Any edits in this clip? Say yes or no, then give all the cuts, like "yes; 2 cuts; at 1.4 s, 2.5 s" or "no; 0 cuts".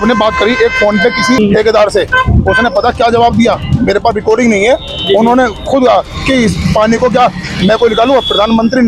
yes; 1 cut; at 1.4 s